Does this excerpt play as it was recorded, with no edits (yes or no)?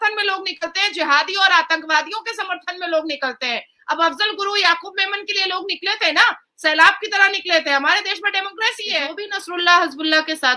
no